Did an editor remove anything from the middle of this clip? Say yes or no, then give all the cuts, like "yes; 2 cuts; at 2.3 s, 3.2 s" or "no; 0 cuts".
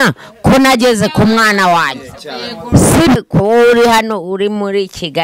yes; 1 cut; at 3.2 s